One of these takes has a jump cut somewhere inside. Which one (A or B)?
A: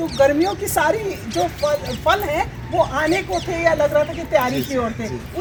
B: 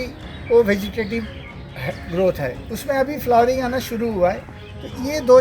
B